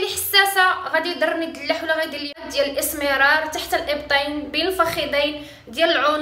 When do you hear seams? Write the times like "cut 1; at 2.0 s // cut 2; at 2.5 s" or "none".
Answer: cut 1; at 2.5 s